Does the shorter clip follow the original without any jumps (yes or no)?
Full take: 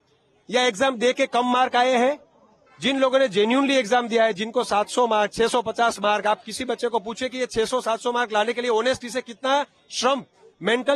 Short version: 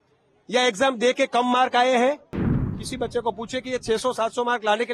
no